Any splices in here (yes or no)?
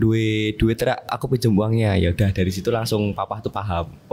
yes